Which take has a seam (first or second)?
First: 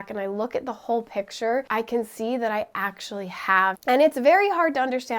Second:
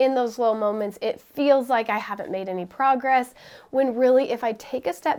first